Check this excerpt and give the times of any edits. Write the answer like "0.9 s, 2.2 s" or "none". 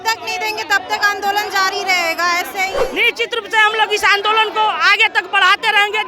2.8 s